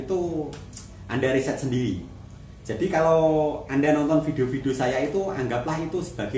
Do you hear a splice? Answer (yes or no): no